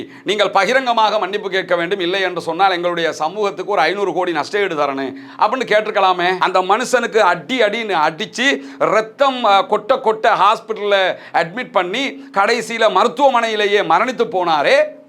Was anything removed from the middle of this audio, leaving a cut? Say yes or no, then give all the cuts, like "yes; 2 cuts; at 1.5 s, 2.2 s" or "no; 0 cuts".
yes; 1 cut; at 6.4 s